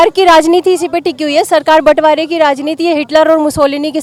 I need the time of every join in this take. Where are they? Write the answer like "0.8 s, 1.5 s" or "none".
none